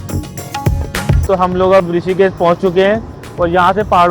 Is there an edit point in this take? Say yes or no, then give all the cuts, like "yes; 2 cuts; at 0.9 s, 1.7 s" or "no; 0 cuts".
yes; 1 cut; at 1.2 s